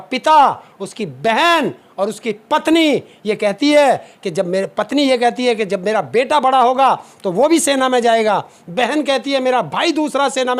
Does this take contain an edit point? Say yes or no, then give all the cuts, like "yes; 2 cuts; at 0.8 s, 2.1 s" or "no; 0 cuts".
no; 0 cuts